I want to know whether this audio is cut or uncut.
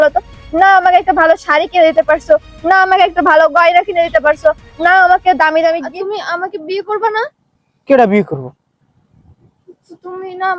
cut